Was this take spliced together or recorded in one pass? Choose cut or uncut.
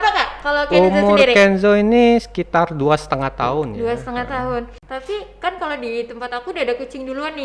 cut